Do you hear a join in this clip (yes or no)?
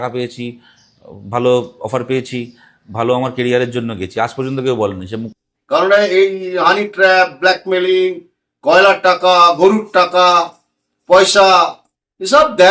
yes